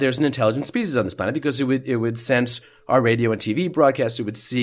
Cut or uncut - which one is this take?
uncut